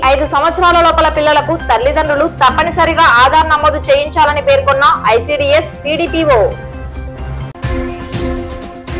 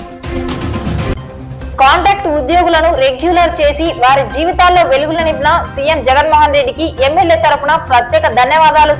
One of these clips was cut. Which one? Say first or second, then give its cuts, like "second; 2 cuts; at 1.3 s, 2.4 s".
second; 1 cut; at 1.1 s